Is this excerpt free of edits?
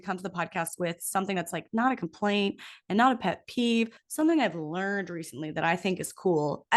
no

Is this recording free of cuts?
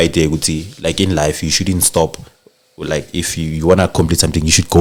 yes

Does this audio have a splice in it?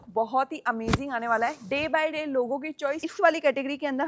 yes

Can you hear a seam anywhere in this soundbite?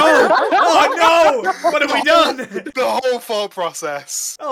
yes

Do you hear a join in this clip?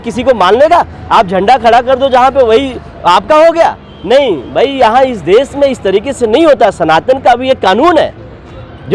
no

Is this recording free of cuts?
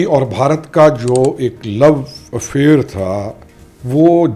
yes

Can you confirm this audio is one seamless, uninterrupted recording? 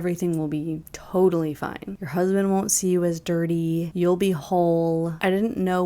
no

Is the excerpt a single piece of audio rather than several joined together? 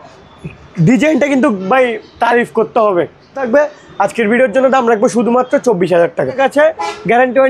no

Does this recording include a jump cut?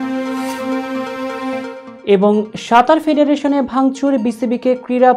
no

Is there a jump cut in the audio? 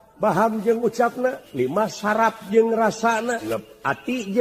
yes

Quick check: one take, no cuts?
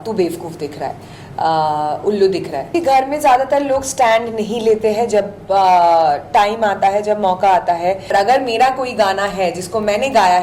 no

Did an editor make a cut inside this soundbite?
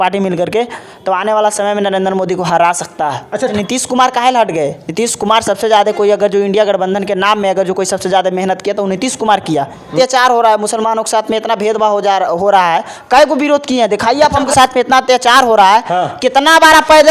yes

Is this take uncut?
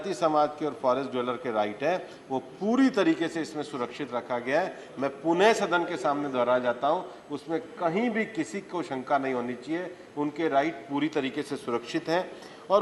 yes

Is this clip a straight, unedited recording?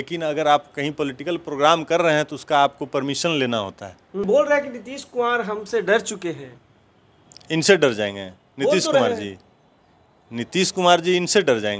no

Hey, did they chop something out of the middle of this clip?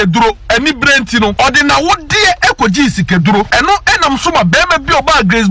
yes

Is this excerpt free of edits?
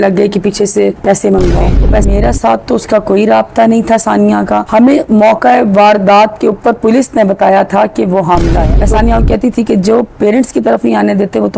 no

